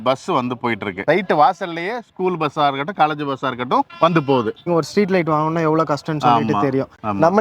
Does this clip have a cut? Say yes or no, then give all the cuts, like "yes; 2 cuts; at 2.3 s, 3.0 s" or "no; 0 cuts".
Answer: yes; 2 cuts; at 1.0 s, 4.7 s